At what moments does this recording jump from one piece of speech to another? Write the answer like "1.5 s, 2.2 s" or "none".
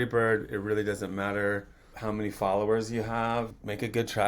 2.0 s, 3.5 s